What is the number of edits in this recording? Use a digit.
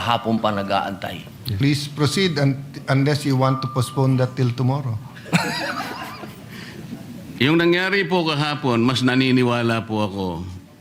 2